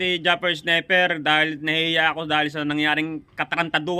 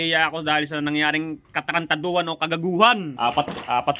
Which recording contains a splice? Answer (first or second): second